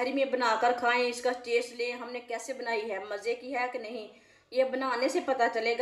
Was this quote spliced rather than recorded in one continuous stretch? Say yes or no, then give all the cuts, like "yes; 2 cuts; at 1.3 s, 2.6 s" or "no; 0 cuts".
no; 0 cuts